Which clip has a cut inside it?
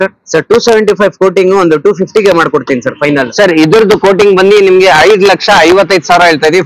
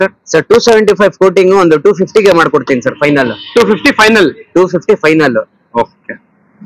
first; 1 cut; at 3.3 s

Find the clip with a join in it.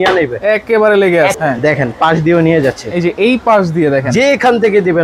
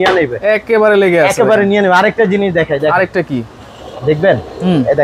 first; 1 cut; at 1.3 s

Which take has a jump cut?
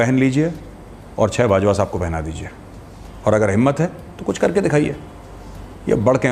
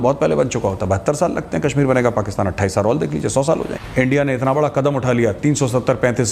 second; 1 cut; at 3.8 s

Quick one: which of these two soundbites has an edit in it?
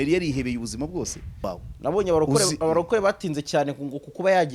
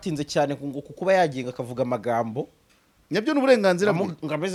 first; 1 cut; at 1.5 s

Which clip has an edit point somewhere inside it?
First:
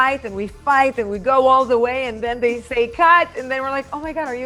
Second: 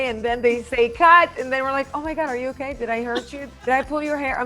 second; 1 cut; at 3.4 s

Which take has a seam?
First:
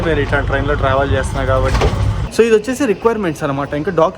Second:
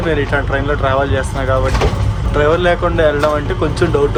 first; 1 cut; at 2.2 s

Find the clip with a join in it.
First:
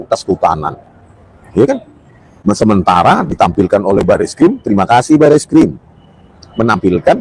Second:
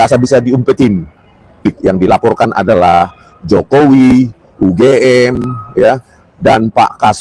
second; 1 cut; at 1.6 s

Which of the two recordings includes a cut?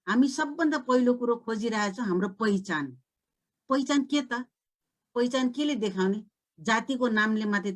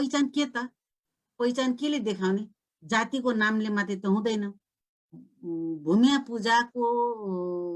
second; 1 cut; at 5.1 s

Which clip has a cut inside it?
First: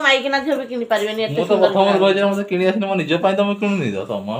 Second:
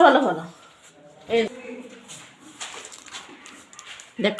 second; 1 cut; at 1.5 s

